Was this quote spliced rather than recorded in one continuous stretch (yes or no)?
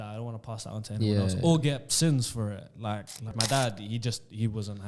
yes